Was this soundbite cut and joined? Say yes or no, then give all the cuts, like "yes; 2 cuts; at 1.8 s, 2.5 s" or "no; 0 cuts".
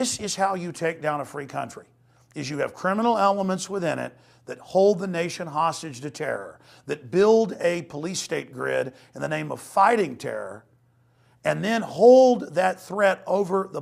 no; 0 cuts